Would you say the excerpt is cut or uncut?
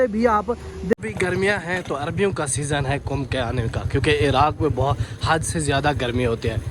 cut